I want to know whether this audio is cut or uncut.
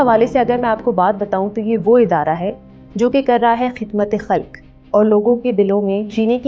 uncut